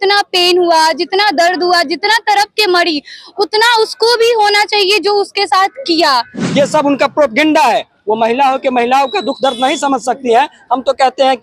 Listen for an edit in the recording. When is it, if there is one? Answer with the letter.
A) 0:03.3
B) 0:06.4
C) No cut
B